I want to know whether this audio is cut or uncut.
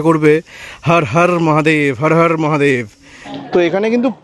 cut